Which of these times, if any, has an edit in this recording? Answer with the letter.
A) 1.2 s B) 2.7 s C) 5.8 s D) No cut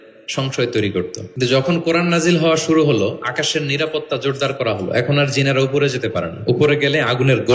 A